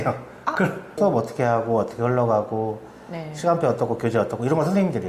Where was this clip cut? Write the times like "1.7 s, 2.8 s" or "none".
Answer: 0.9 s